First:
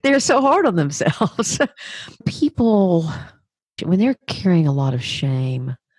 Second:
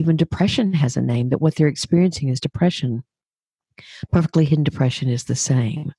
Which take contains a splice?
first; 2 cuts; at 2.3 s, 3.7 s

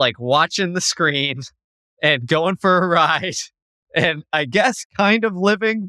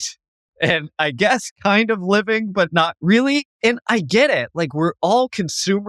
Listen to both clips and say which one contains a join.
second; 1 cut; at 3.5 s

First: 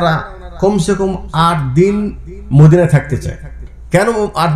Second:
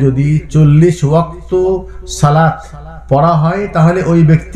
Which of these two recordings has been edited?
first; 1 cut; at 3.6 s

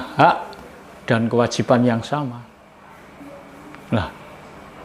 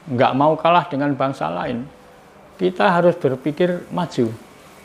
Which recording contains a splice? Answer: first; 1 cut; at 2.5 s

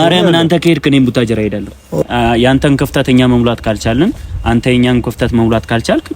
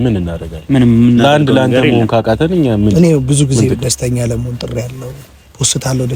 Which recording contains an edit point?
first; 1 cut; at 2.0 s

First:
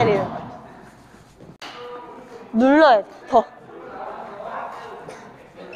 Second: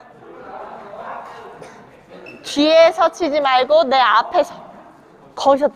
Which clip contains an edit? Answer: first; 1 cut; at 1.6 s

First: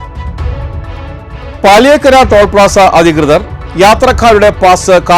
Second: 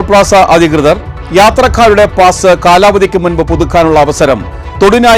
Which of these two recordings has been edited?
first; 1 cut; at 1.1 s

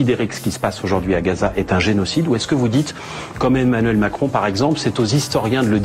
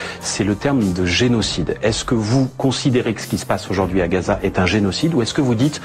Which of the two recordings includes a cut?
second; 1 cut; at 1.3 s

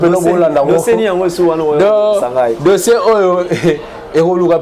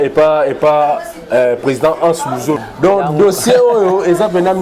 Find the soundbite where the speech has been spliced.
second; 1 cut; at 2.6 s

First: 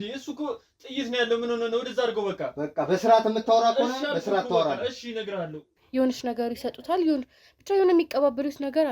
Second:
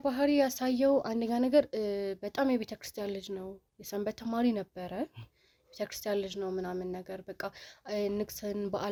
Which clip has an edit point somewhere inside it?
first; 1 cut; at 5.8 s

